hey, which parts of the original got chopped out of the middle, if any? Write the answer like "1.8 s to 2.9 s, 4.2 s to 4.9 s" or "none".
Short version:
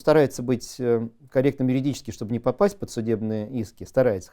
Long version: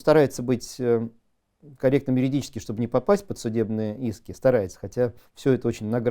1.2 s to 1.6 s

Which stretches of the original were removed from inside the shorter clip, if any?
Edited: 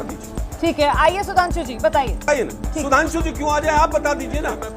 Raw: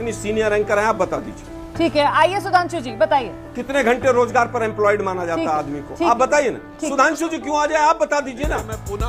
3.5 s to 6.4 s

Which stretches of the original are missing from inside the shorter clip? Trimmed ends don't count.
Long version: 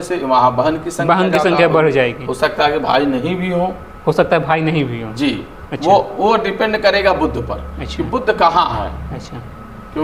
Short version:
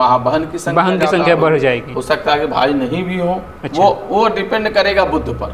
3.9 s to 5.6 s

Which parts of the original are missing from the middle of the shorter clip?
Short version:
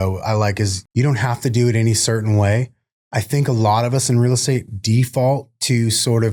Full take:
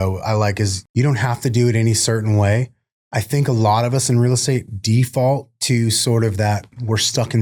none

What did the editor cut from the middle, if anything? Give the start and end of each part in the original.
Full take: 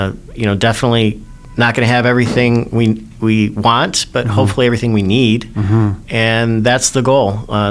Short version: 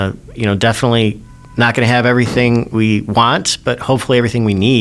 2.7 s to 3.2 s

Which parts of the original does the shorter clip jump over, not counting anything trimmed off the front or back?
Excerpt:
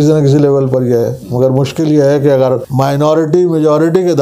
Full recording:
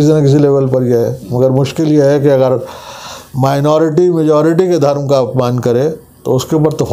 2.7 s to 3.3 s

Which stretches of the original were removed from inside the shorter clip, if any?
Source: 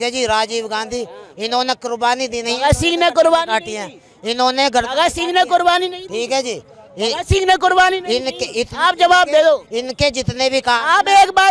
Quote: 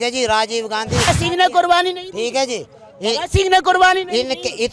1.1 s to 5.0 s

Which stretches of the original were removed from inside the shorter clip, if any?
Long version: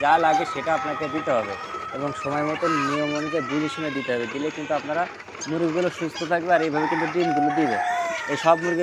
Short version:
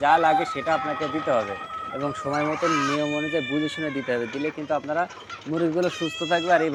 none

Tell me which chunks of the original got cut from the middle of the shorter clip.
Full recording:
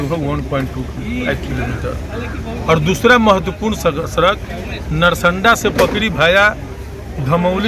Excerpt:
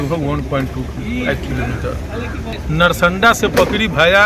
2.5 s to 4.7 s

